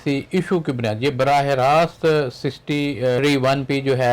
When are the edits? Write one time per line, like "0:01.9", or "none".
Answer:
0:03.2